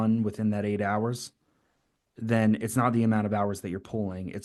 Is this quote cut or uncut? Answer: uncut